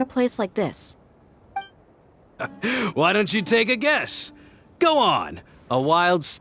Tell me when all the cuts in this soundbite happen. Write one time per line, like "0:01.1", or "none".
0:02.3